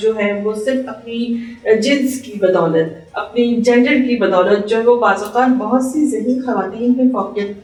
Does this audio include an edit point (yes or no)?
no